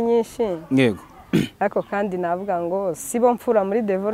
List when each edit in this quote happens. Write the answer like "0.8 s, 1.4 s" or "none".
none